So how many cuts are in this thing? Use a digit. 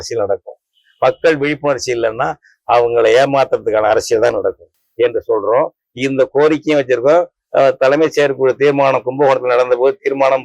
1